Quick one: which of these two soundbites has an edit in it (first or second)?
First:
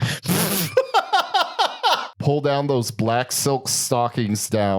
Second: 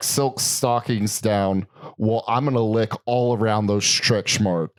first